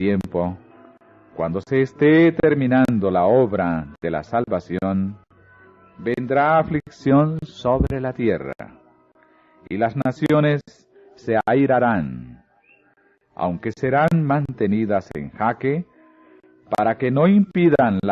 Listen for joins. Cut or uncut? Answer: cut